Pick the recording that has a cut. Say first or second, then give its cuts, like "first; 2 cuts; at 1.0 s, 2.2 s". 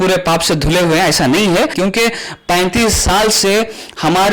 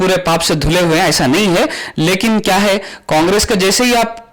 first; 1 cut; at 1.7 s